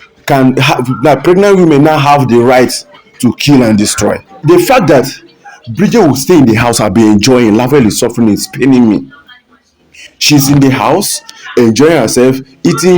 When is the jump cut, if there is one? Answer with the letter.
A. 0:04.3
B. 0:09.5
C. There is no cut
A